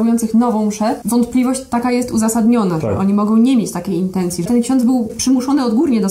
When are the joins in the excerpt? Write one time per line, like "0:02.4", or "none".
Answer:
0:01.0
0:04.4
0:05.2

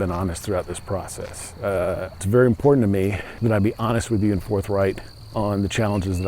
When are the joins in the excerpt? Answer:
0:02.2
0:03.3
0:05.1

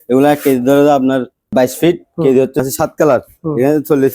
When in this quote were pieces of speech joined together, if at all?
0:01.4
0:02.6

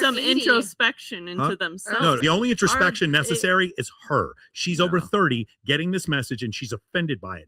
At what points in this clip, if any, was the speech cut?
0:02.2

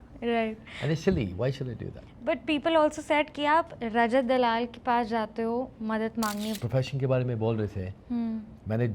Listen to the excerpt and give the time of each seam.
0:06.5

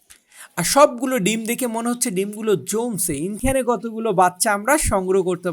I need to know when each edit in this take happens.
0:03.4

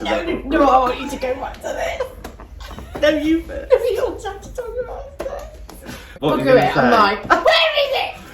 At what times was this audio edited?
0:06.1

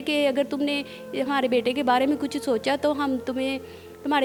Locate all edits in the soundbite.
none

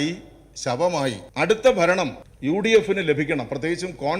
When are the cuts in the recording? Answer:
0:01.2
0:02.3

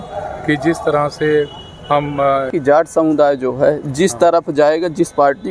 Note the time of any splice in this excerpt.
0:02.5

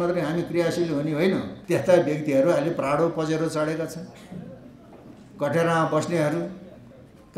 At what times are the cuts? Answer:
0:01.5

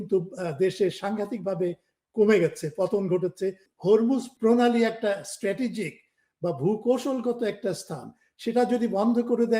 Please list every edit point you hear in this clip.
0:03.6
0:04.3

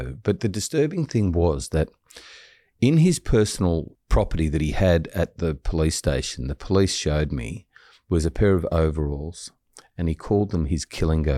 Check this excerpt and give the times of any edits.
0:03.9

